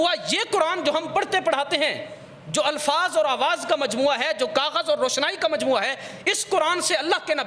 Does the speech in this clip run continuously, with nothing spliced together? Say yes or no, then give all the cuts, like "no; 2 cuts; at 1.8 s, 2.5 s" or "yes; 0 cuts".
yes; 0 cuts